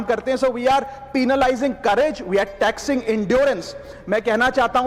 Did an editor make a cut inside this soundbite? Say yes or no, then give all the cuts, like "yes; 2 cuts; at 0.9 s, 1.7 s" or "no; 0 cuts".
no; 0 cuts